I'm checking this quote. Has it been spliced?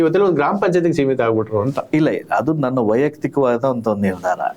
no; 0 cuts

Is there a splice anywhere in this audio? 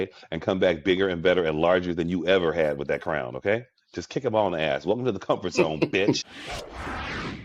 yes; 1 cut; at 6.2 s

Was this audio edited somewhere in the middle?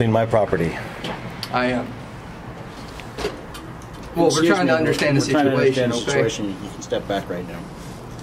no; 0 cuts

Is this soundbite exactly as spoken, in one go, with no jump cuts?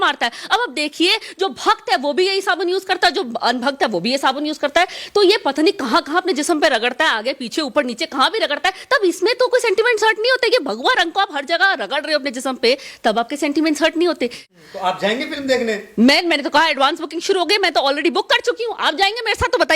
no; 1 cut; at 14.4 s

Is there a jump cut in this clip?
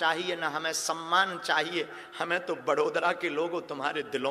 no; 0 cuts

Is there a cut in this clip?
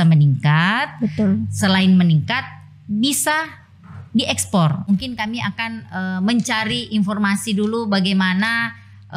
yes; 1 cut; at 4.9 s

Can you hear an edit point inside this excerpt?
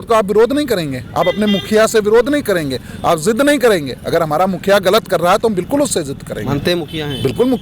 no; 0 cuts

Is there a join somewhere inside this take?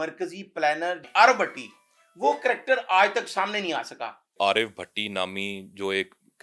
yes; 2 cuts; at 1.0 s, 4.3 s

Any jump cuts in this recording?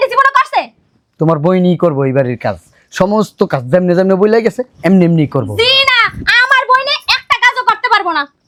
no; 0 cuts

